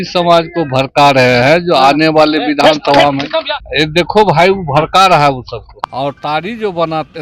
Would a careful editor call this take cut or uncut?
cut